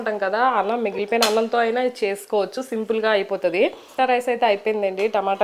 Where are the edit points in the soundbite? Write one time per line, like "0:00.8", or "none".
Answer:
0:04.0